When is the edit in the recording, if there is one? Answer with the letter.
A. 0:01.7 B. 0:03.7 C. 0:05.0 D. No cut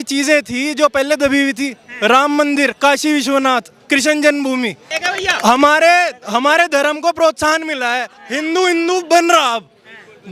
C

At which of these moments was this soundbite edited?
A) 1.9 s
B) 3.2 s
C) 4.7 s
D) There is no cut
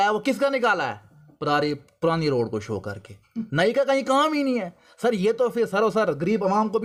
D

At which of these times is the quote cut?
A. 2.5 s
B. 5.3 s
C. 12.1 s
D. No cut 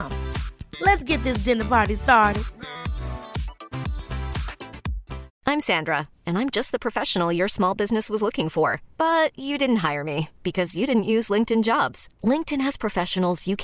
B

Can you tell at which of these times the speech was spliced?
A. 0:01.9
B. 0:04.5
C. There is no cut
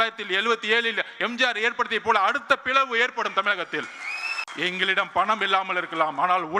B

